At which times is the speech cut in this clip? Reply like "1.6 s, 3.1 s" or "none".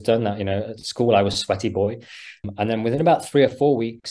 2.4 s